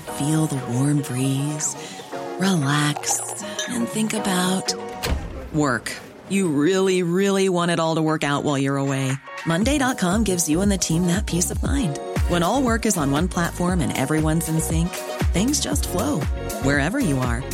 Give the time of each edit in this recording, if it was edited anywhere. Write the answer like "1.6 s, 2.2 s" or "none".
none